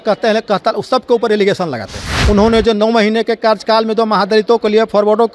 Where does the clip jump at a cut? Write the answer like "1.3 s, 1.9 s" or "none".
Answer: 2.2 s